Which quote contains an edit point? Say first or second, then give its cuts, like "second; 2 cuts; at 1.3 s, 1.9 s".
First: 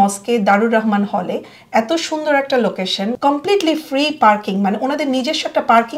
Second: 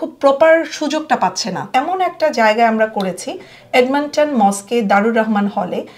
second; 1 cut; at 1.6 s